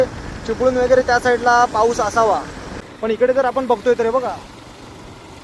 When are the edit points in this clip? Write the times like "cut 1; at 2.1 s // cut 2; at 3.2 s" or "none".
cut 1; at 2.7 s